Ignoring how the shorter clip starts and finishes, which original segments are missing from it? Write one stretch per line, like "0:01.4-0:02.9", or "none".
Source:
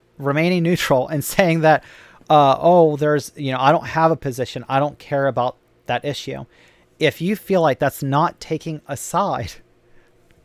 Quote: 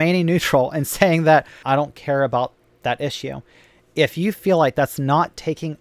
0:01.9-0:04.6